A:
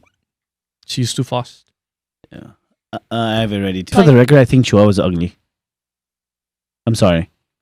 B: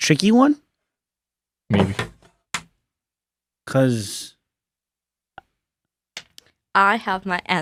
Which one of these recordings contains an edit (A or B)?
A